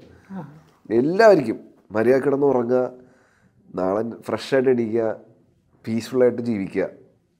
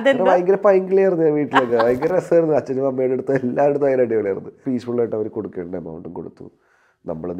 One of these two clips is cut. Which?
second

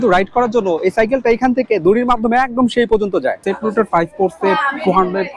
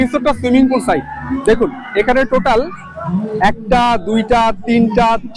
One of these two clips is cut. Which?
first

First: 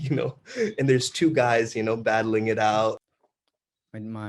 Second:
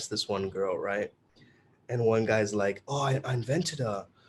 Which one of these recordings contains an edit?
first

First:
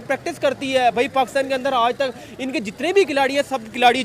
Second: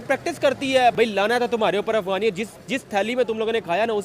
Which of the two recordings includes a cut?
second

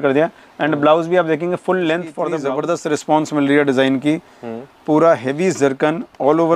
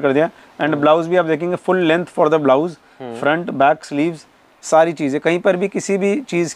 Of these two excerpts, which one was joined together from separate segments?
first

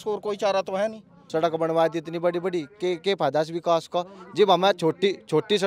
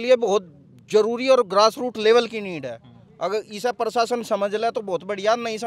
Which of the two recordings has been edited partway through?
first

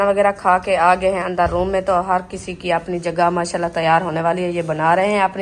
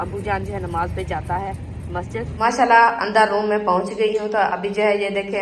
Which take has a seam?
second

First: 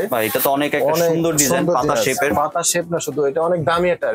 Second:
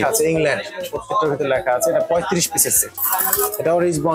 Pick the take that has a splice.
second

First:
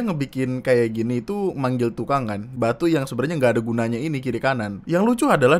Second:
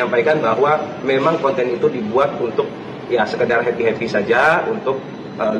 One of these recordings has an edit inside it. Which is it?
first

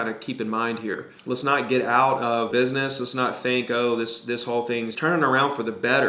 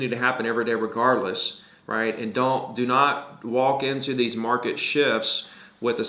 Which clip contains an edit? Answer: first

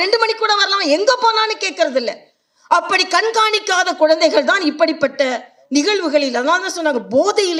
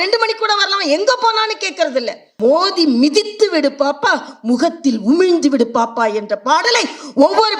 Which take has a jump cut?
second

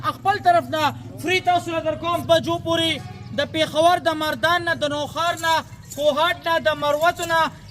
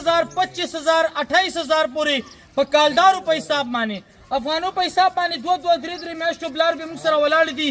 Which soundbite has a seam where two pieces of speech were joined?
first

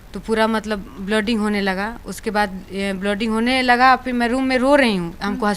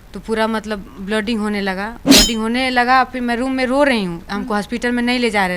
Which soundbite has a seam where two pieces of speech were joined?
second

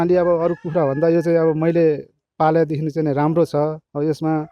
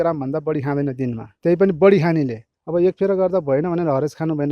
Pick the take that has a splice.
second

